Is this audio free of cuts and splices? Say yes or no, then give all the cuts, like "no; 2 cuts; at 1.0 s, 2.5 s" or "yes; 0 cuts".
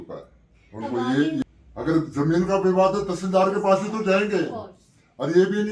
no; 1 cut; at 1.4 s